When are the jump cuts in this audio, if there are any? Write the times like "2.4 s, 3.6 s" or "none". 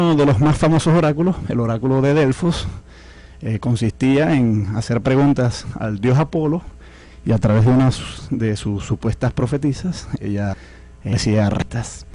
none